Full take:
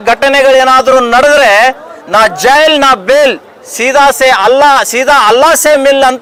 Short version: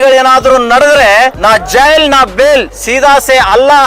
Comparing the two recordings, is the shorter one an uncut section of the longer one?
no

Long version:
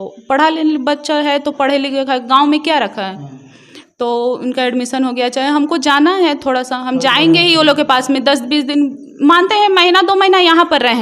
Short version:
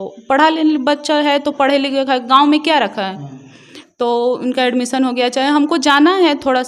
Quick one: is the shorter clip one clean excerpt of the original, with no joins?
yes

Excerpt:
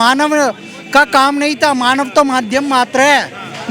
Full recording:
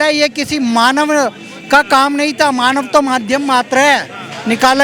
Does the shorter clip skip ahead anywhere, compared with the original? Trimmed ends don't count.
no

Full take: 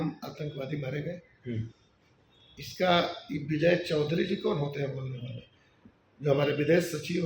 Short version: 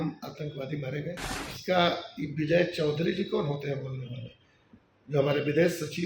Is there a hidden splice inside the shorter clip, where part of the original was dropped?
yes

